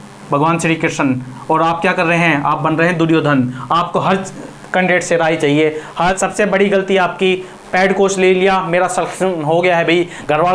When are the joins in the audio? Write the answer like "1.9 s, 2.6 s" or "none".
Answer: 6.2 s